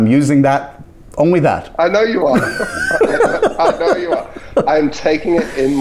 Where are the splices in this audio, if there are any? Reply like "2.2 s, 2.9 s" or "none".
4.6 s